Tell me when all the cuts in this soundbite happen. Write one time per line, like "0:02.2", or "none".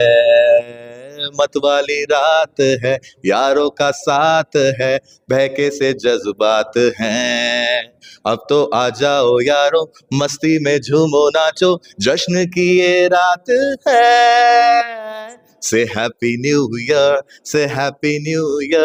none